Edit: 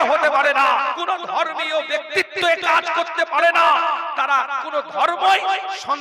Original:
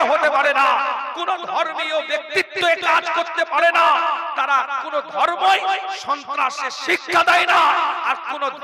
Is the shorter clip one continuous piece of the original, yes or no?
no